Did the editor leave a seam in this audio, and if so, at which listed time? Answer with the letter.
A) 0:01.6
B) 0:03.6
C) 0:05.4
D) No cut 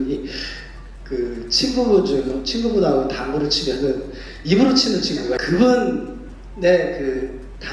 C